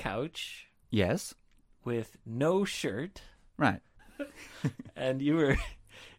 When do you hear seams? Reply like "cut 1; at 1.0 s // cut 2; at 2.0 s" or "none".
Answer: cut 1; at 3.9 s